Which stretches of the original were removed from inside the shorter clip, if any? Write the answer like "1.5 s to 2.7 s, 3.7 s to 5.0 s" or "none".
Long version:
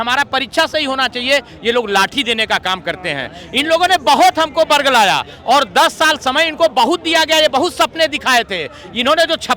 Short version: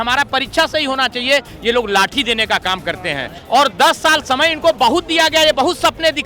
3.4 s to 5.3 s